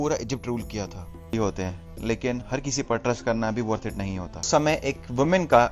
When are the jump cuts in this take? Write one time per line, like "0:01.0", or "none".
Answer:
0:01.3
0:04.5